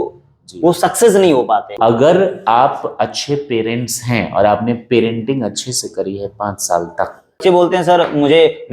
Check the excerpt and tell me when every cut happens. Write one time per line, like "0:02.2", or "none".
0:01.8
0:07.4